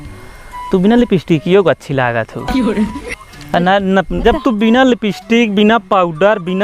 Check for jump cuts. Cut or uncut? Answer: cut